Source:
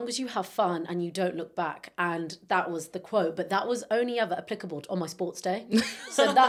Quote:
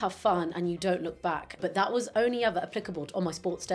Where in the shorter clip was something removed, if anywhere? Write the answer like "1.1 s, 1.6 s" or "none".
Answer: 1.6 s